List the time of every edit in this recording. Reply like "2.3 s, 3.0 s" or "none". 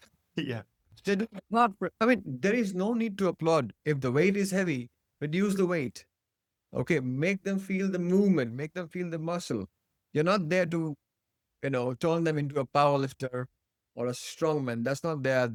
none